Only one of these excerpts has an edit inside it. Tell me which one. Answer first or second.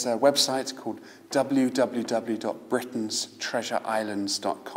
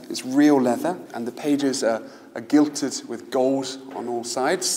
second